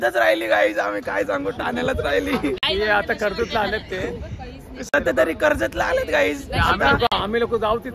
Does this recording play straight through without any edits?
yes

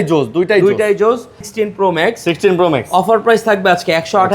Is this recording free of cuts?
no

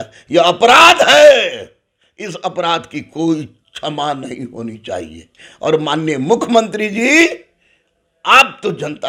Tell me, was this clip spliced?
no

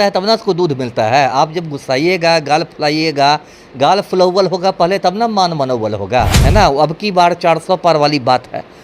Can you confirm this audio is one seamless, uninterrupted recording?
no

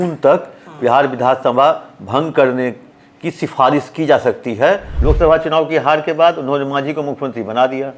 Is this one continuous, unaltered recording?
no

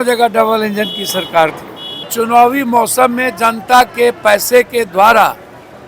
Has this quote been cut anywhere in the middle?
yes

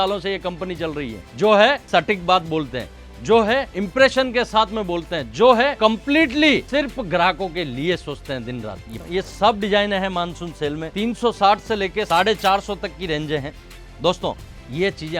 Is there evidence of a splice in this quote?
yes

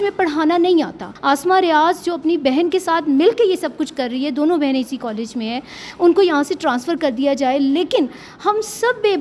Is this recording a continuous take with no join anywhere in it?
no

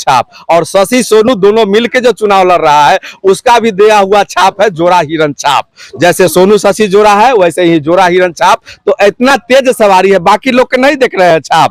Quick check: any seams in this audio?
no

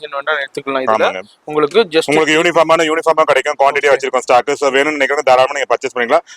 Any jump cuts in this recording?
no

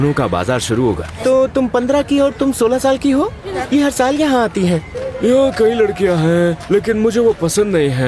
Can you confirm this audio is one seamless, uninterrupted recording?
no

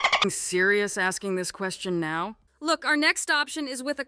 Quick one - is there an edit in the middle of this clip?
yes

